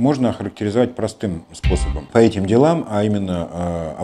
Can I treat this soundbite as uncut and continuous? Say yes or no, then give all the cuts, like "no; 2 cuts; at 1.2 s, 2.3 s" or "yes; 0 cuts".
no; 1 cut; at 1.9 s